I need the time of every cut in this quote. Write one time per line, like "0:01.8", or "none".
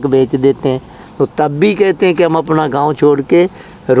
0:01.0